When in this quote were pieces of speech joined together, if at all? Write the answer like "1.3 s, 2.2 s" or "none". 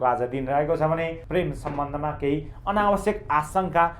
1.2 s